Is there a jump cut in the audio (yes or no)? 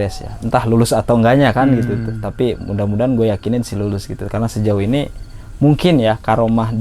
no